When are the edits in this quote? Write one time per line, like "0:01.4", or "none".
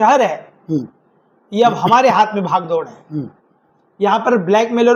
none

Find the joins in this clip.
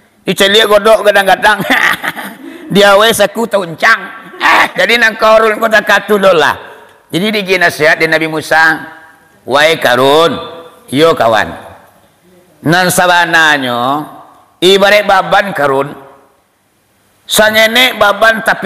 0:04.7

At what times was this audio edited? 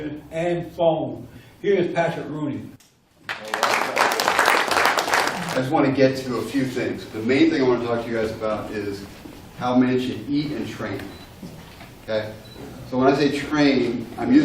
0:12.0

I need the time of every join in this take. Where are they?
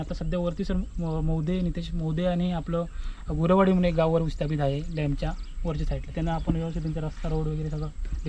none

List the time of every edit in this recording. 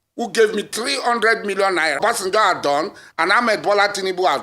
0:02.0

